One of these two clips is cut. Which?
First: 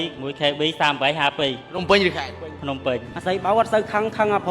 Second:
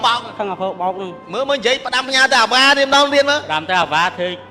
first; 1 cut; at 3.1 s

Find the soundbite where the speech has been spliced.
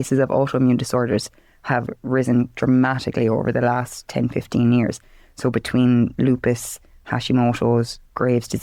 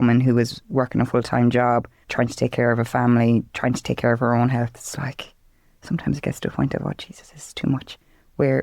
second; 1 cut; at 2.0 s

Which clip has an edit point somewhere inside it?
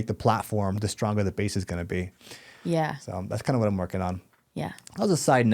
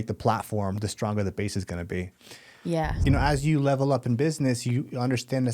second; 1 cut; at 3.0 s

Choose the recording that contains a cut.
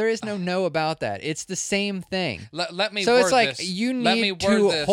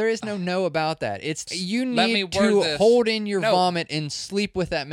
second; 1 cut; at 1.5 s

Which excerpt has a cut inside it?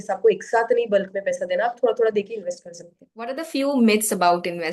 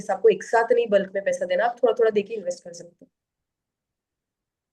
first; 1 cut; at 3.4 s

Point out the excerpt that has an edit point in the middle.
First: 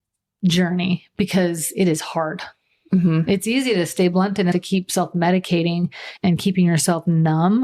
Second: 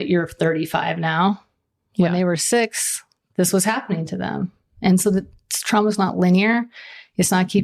first; 2 cuts; at 4.5 s, 6.1 s

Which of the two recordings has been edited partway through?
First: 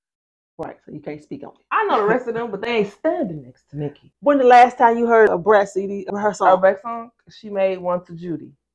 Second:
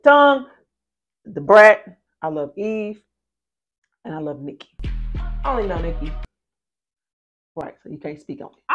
first; 1 cut; at 6.1 s

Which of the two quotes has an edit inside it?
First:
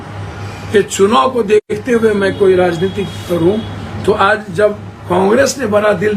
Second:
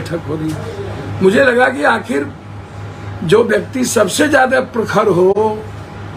first; 1 cut; at 1.7 s

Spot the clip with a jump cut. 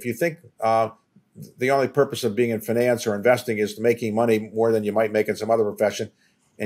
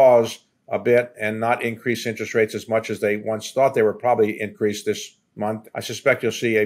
second; 1 cut; at 5.6 s

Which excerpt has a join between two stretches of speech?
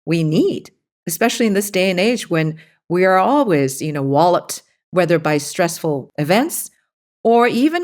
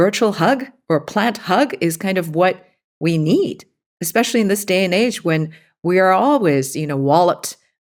first; 1 cut; at 6.1 s

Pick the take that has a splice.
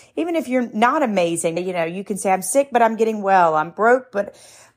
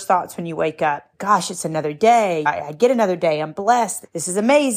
first; 1 cut; at 1.6 s

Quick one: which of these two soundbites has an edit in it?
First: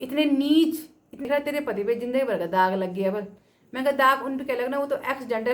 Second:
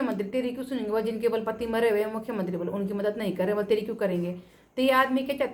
first; 1 cut; at 1.3 s

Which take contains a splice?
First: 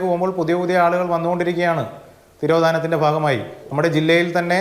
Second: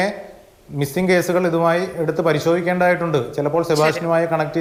first; 1 cut; at 3.6 s

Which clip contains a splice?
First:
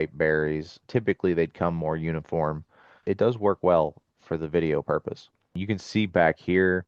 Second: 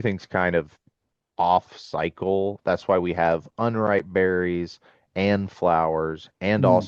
first; 2 cuts; at 3.0 s, 5.6 s

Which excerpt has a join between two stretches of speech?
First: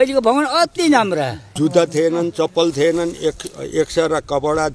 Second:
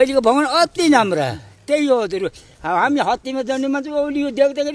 first; 1 cut; at 1.4 s

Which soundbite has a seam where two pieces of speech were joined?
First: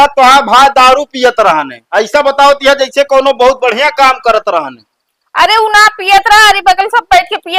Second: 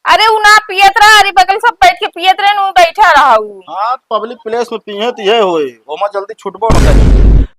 second; 1 cut; at 6.7 s

